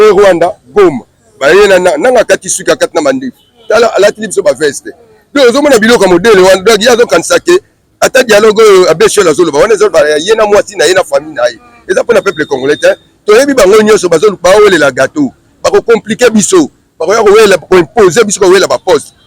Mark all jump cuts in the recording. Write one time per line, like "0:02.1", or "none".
none